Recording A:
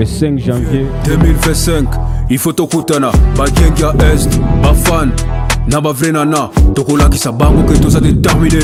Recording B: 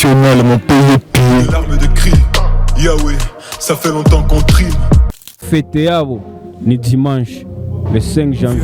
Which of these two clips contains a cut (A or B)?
B